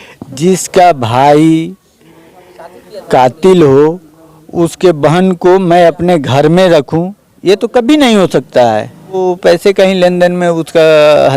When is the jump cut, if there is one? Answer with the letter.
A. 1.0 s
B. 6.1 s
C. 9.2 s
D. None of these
C